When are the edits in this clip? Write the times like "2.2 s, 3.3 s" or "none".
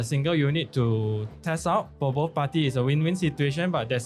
1.9 s